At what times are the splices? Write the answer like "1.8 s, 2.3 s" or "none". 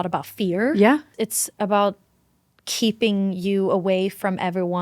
1.1 s